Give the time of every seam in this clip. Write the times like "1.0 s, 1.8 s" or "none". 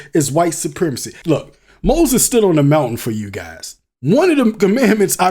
1.2 s